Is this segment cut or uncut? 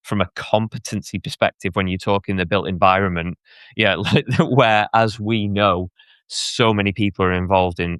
uncut